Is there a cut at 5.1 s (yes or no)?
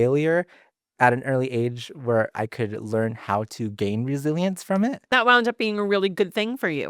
yes